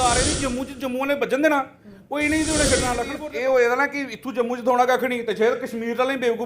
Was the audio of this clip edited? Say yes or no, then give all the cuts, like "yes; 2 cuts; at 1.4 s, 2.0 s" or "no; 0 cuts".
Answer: yes; 1 cut; at 3.1 s